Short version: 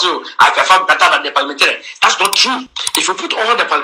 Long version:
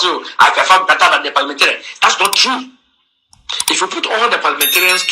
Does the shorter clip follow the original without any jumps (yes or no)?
no